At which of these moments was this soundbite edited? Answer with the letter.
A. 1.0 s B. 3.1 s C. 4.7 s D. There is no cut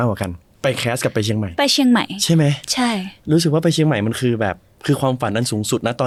D